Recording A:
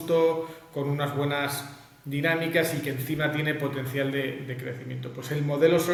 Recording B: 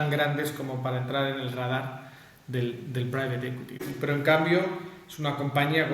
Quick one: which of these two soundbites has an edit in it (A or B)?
B